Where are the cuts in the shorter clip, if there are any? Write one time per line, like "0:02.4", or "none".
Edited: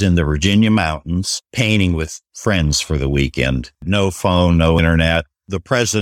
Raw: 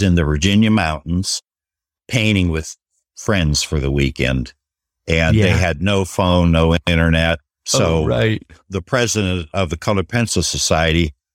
0:01.4
0:02.2
0:03.8
0:05.1